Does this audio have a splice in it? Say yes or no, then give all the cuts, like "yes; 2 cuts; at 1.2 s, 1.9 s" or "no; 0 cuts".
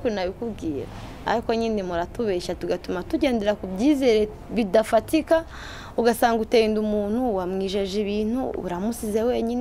no; 0 cuts